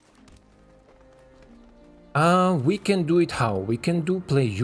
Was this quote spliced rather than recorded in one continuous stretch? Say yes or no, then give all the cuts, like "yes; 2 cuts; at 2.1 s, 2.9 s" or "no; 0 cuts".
no; 0 cuts